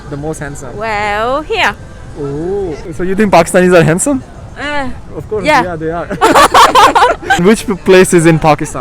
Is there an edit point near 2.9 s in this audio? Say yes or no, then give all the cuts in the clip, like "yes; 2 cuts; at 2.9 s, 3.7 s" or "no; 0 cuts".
yes; 2 cuts; at 2.9 s, 7.4 s